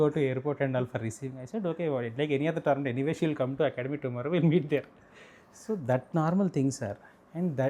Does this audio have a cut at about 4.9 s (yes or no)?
no